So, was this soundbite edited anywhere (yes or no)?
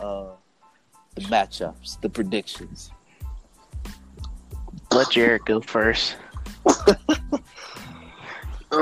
yes